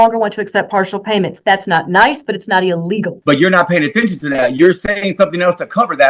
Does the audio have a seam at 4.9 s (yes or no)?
no